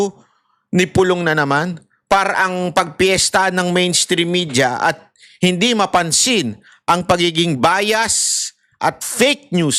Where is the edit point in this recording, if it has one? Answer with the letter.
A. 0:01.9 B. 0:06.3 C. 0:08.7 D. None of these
D